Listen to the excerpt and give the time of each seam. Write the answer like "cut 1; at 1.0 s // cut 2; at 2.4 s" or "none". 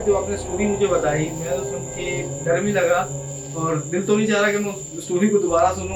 none